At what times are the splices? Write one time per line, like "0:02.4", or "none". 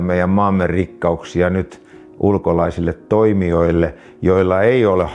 none